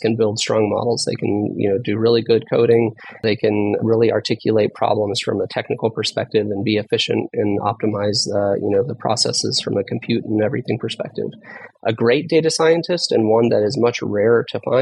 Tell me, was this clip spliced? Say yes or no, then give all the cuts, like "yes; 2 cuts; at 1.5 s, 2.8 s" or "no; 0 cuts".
yes; 1 cut; at 3.2 s